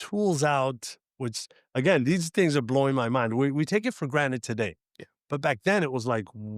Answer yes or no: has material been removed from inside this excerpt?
no